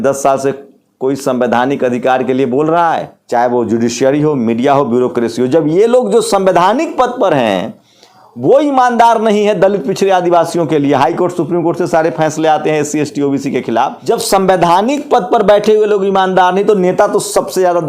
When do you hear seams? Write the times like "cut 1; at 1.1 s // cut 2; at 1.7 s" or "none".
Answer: cut 1; at 3.1 s // cut 2; at 14.0 s